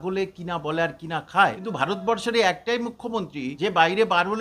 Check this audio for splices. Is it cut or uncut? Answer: cut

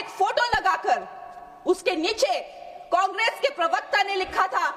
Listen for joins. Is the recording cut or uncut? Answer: uncut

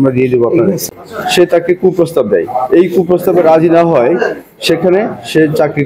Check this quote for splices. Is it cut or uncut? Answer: cut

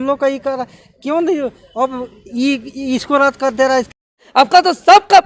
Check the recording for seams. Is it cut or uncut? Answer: cut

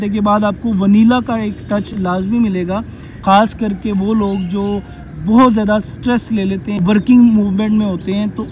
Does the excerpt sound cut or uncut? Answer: cut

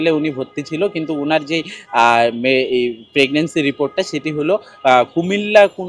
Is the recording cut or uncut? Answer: uncut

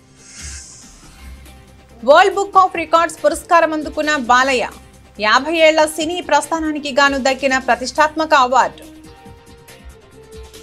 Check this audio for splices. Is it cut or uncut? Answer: uncut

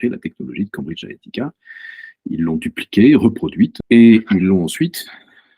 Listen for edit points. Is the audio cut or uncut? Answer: cut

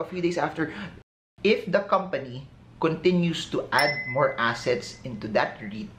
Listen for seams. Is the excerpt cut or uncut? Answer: cut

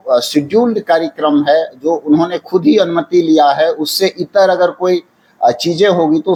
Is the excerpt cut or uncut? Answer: uncut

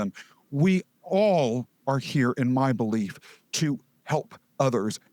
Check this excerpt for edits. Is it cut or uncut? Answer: cut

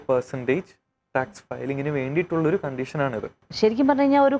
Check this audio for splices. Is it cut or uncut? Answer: cut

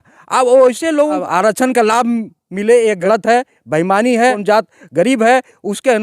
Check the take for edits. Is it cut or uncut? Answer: cut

